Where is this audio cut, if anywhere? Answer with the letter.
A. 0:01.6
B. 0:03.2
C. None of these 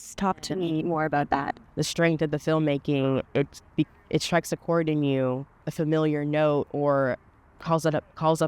A